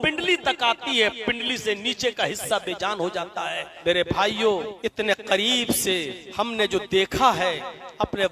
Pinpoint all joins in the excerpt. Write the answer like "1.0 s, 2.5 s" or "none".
3.7 s, 4.7 s, 6.2 s